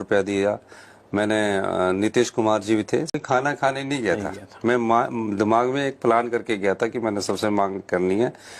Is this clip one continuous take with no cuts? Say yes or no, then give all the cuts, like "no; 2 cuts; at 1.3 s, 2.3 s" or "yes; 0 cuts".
no; 1 cut; at 3.2 s